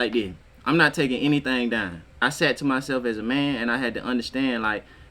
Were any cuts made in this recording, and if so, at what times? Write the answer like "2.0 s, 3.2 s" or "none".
2.2 s